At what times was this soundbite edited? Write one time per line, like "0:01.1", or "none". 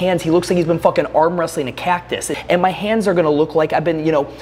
0:02.3